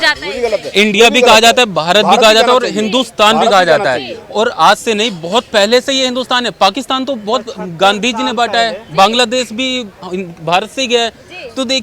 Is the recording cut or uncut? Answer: uncut